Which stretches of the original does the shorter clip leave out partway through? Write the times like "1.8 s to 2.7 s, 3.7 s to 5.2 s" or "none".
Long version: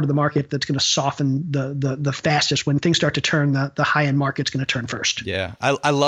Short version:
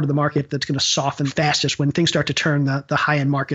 1.3 s to 2.2 s